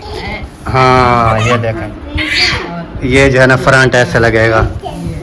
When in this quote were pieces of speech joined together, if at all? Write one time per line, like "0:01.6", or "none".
0:01.8